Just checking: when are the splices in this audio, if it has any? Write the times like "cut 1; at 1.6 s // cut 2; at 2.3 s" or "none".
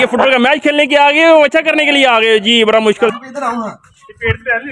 cut 1; at 3.1 s